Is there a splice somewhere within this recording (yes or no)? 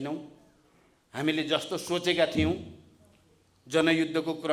no